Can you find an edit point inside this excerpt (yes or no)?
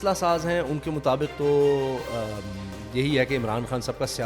no